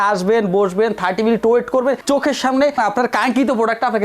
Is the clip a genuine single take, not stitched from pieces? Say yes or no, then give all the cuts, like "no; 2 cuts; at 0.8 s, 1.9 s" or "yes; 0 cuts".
no; 1 cut; at 2.8 s